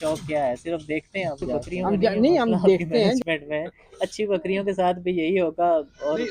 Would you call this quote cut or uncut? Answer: cut